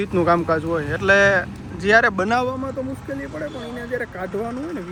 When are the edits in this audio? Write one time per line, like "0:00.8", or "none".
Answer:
none